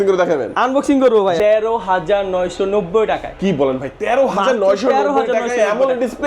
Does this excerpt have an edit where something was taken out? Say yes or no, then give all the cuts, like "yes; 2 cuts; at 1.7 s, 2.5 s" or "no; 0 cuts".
yes; 1 cut; at 1.4 s